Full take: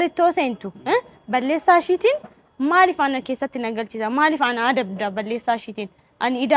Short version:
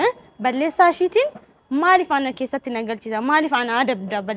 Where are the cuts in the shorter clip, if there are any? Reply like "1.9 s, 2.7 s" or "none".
none